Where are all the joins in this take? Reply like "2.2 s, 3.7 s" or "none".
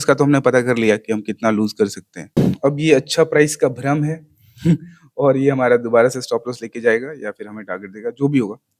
2.4 s